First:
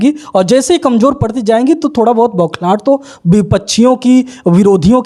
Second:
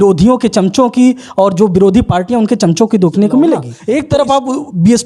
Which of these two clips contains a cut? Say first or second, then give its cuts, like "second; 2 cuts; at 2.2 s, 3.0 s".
second; 1 cut; at 3.7 s